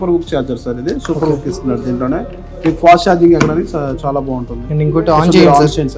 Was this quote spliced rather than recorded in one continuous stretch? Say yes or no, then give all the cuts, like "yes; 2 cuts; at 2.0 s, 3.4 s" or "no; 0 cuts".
no; 0 cuts